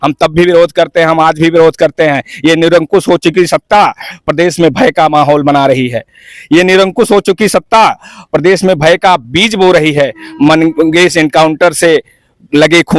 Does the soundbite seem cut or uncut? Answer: uncut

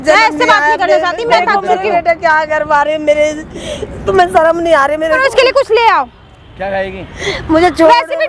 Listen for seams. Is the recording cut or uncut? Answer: cut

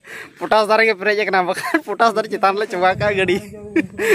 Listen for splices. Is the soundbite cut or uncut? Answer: uncut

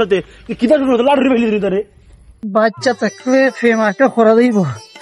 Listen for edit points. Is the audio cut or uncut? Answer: cut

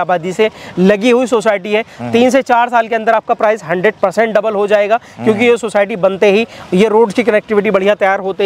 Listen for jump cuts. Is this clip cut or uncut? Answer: uncut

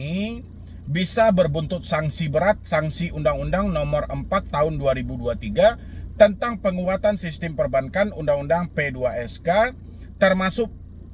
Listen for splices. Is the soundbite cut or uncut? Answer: uncut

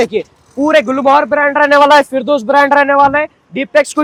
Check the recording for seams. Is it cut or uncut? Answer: uncut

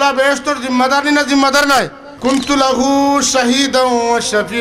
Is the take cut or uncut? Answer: cut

